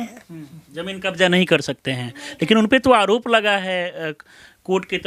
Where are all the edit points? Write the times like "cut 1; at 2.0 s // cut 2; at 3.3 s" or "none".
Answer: none